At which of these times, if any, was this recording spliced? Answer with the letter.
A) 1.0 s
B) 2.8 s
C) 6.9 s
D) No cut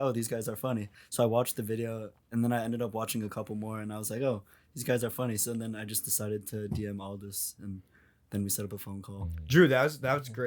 A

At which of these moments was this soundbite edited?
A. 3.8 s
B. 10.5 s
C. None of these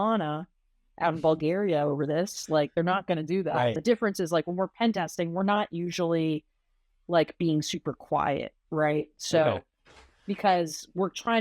A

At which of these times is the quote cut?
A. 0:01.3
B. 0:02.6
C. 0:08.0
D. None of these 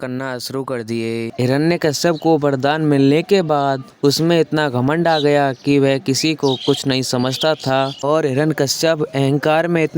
A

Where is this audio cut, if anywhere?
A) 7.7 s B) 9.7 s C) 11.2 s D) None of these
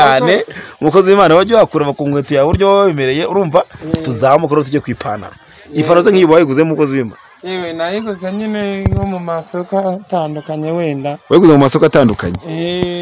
D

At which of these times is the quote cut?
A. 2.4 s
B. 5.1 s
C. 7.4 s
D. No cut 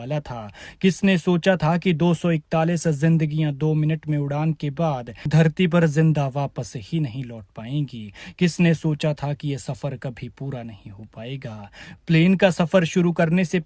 B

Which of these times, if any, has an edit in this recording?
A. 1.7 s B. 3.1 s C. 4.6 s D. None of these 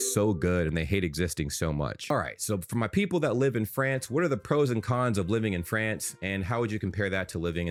D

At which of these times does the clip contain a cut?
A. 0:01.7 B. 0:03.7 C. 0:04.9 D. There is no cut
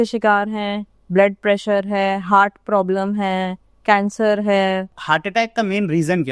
C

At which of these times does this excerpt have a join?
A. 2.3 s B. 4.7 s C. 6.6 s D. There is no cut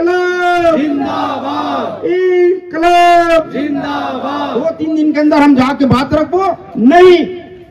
B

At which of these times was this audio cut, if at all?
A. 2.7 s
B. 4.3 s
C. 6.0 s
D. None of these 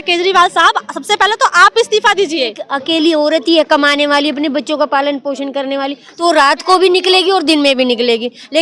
A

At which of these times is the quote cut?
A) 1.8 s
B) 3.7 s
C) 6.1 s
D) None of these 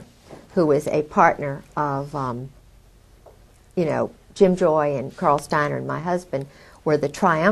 B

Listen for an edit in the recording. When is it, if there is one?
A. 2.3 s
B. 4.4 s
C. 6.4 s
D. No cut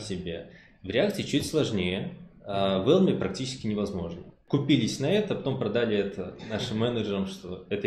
B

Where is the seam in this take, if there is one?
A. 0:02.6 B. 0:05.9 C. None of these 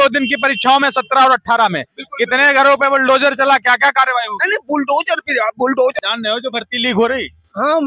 B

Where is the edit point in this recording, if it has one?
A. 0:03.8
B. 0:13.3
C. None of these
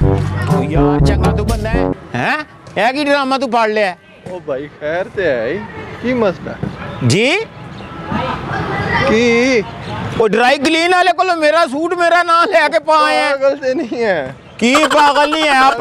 C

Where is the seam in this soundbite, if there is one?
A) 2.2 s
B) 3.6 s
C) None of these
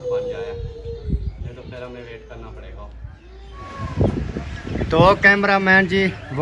B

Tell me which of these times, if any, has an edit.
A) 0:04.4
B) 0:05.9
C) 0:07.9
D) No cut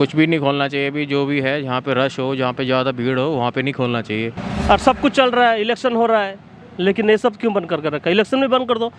A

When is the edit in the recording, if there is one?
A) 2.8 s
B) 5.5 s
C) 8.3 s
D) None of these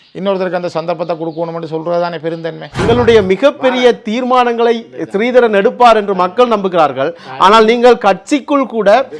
A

